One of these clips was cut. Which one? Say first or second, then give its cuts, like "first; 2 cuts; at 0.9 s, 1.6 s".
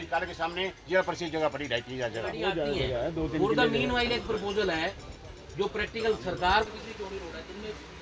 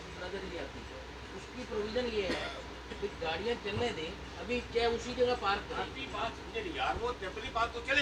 first; 1 cut; at 2.3 s